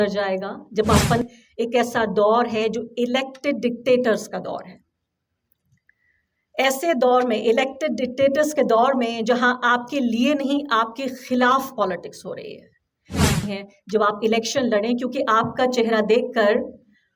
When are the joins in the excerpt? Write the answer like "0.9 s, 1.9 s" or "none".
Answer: 1.2 s, 13.4 s